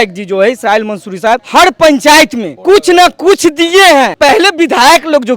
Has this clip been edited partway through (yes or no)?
yes